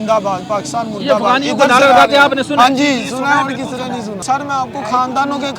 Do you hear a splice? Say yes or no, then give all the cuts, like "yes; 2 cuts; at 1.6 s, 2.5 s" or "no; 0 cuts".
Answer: no; 0 cuts